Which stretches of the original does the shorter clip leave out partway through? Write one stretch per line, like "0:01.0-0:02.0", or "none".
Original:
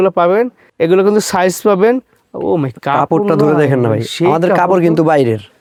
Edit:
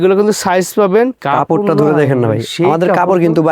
0:02.1-0:02.8